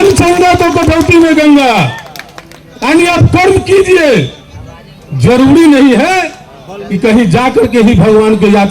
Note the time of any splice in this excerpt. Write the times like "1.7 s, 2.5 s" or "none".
none